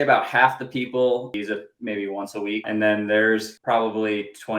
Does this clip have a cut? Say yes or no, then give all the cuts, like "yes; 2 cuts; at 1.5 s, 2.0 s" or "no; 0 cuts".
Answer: yes; 3 cuts; at 1.3 s, 2.6 s, 3.5 s